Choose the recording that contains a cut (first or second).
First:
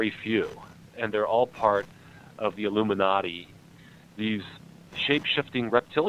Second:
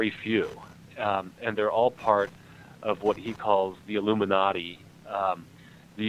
first